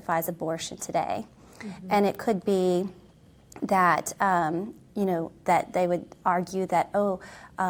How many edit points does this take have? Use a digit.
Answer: 0